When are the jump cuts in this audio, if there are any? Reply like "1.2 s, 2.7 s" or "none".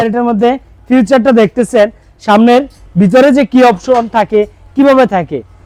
none